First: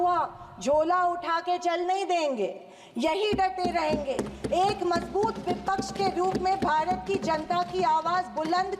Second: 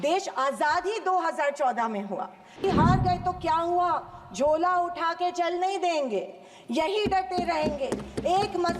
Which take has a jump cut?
second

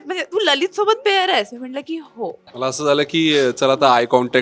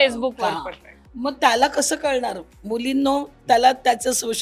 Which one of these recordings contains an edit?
first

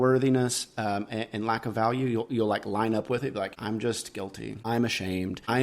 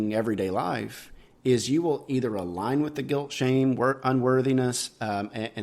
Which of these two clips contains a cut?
first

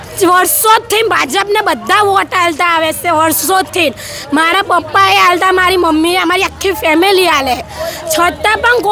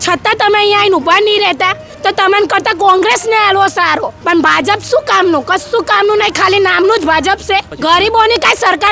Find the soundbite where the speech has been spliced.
second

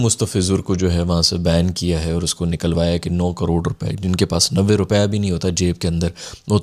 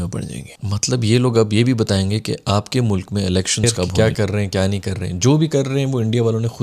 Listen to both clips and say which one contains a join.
second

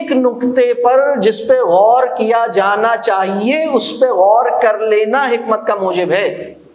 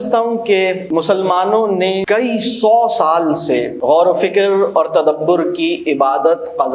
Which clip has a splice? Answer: second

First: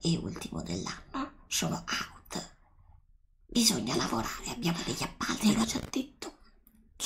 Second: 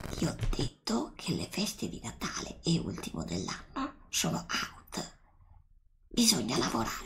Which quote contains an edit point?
first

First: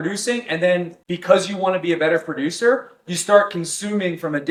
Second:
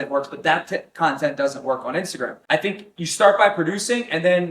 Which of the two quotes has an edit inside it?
second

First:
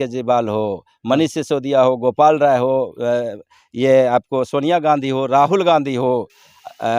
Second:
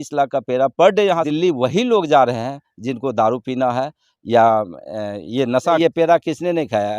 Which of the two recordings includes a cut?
second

